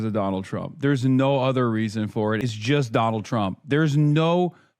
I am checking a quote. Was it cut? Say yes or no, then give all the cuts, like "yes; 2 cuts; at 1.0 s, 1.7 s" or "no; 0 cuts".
yes; 1 cut; at 2.5 s